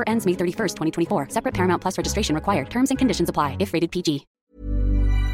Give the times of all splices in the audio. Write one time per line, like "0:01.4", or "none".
0:04.3